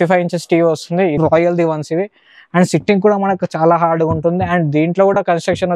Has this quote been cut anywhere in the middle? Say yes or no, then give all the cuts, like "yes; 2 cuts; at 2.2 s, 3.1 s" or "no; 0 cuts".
yes; 1 cut; at 1.2 s